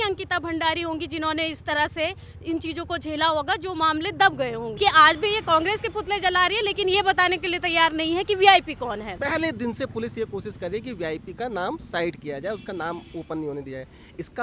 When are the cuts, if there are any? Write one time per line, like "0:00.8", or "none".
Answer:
0:04.7
0:09.1

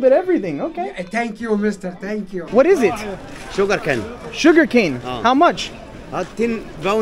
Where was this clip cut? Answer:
0:02.4

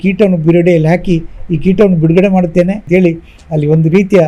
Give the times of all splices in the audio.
0:02.8

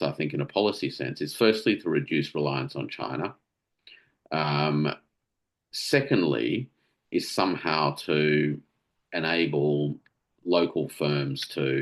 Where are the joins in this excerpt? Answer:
none

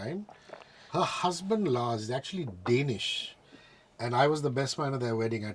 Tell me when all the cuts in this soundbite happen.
none

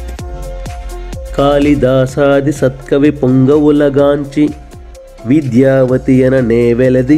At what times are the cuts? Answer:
0:01.4

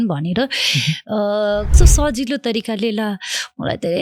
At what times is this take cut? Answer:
0:01.7

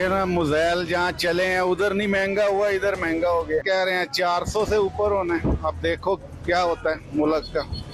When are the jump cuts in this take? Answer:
0:03.6

